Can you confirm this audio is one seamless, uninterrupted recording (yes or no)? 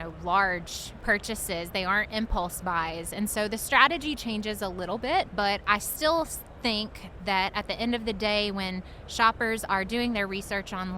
no